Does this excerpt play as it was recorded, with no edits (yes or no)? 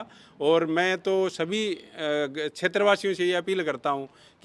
yes